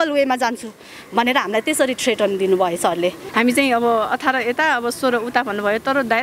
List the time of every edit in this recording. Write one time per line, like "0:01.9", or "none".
0:03.2

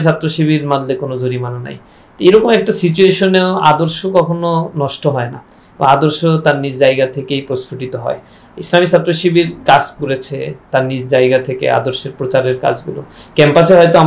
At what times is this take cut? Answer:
none

